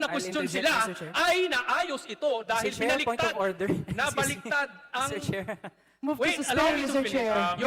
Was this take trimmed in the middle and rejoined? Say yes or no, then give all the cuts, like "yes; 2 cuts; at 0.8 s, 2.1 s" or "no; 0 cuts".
no; 0 cuts